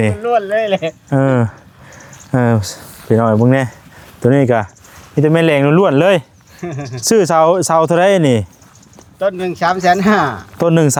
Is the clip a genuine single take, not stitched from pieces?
yes; 0 cuts

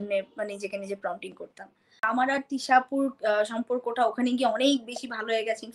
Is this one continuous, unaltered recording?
no; 1 cut; at 2.1 s

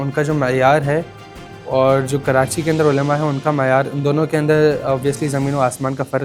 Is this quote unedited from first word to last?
yes; 0 cuts

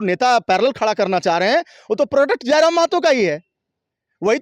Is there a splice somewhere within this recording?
no; 0 cuts

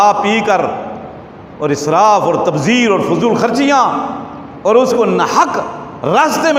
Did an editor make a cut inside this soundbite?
no; 0 cuts

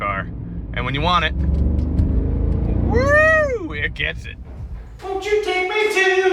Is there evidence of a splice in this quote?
yes; 1 cut; at 4.9 s

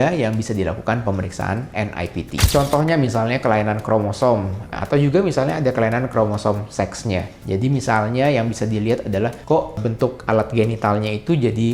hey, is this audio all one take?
no; 3 cuts; at 2.5 s, 4.8 s, 7.4 s

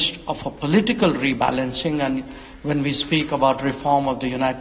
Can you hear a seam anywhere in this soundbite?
no; 0 cuts

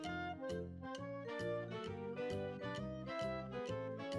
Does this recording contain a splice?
no; 0 cuts

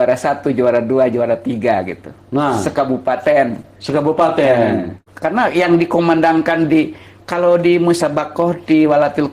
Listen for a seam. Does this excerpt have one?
yes; 1 cut; at 4.9 s

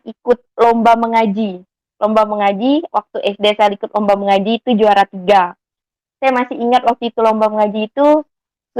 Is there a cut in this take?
no; 0 cuts

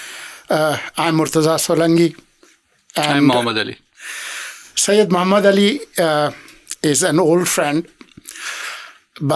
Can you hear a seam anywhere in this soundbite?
no; 0 cuts

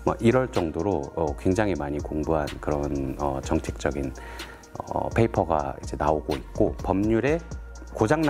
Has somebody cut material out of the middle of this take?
yes; 1 cut; at 6.8 s

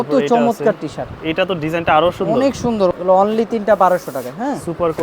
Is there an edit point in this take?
yes; 1 cut; at 2.9 s

